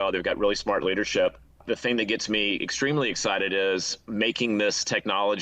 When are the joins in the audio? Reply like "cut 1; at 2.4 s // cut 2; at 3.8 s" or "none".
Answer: cut 1; at 1.6 s